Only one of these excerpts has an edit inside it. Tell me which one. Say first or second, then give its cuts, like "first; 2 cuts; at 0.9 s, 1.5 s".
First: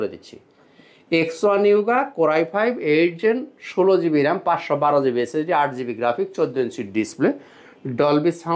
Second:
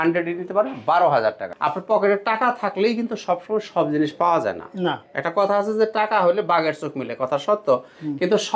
second; 1 cut; at 1.5 s